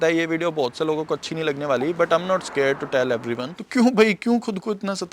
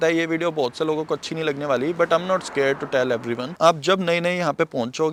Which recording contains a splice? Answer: first; 1 cut; at 3.5 s

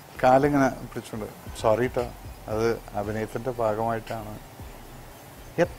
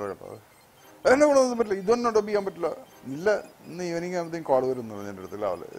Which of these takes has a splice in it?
second; 1 cut; at 2.8 s

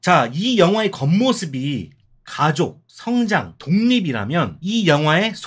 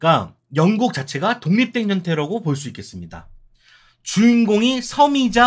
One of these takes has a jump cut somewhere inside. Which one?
first; 3 cuts; at 2.9 s, 3.5 s, 4.6 s

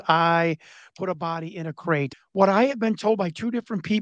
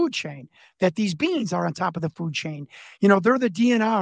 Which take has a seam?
first; 1 cut; at 2.1 s

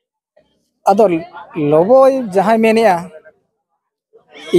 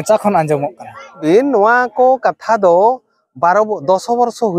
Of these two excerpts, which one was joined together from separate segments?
second; 1 cut; at 1.2 s

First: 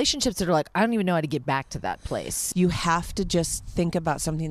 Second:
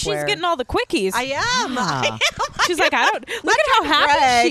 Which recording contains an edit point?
first; 1 cut; at 2.3 s

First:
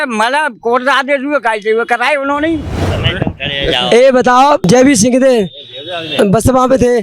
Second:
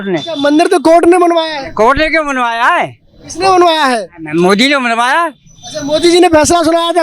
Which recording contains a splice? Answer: first; 2 cuts; at 2.9 s, 4.7 s

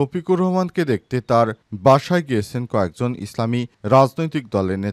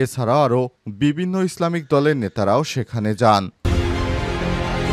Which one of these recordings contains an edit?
second; 1 cut; at 3.6 s

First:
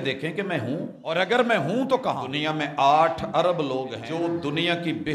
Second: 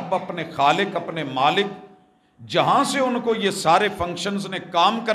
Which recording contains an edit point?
first; 3 cuts; at 1.0 s, 2.3 s, 4.0 s

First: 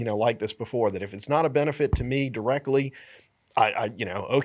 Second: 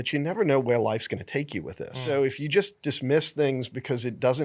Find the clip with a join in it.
second; 1 cut; at 2.0 s

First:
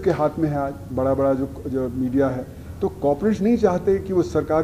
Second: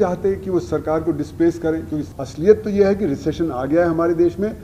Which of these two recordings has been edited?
second; 1 cut; at 2.2 s

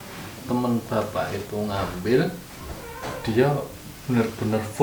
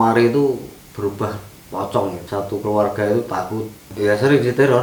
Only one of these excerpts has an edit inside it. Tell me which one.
second; 2 cuts; at 2.2 s, 3.8 s

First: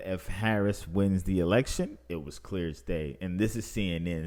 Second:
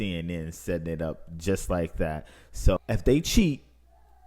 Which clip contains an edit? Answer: second; 1 cut; at 2.8 s

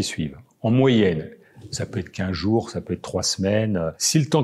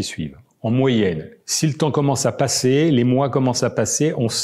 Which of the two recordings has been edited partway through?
second; 1 cut; at 1.5 s

